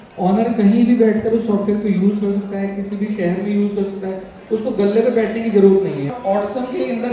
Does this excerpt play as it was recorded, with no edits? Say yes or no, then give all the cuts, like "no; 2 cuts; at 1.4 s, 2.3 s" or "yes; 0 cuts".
no; 1 cut; at 6.1 s